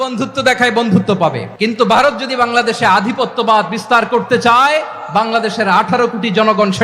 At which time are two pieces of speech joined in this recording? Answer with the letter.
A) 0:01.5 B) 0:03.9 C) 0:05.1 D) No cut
A